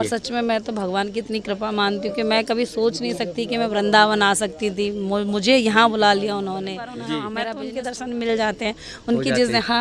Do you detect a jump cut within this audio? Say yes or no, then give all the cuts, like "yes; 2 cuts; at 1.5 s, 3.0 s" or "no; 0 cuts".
yes; 1 cut; at 7.3 s